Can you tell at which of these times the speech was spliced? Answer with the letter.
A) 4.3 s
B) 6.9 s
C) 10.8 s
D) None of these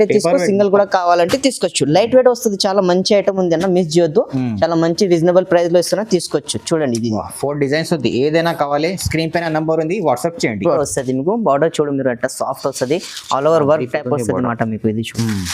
C